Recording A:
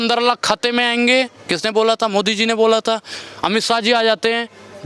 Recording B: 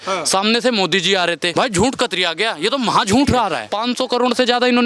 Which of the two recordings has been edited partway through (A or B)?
B